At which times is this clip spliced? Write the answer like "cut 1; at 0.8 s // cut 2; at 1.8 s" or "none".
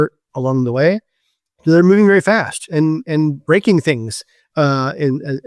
none